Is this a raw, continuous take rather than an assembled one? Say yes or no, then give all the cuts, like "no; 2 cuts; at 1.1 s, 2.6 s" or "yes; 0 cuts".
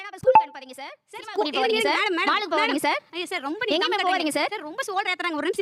yes; 0 cuts